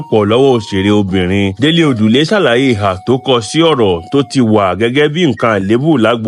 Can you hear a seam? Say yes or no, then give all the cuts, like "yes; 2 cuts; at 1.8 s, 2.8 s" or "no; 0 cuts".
no; 0 cuts